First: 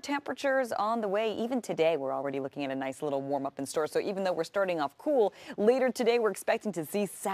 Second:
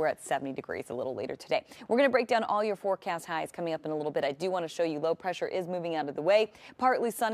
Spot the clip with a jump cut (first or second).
second